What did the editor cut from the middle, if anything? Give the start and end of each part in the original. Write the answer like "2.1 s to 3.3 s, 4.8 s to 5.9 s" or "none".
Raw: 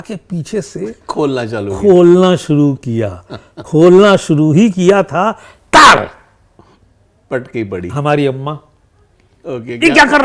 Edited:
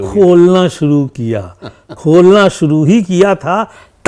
none